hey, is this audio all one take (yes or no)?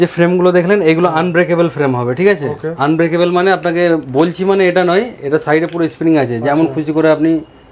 yes